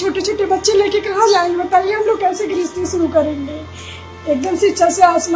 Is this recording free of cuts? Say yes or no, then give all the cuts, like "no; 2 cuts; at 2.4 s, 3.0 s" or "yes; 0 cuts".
yes; 0 cuts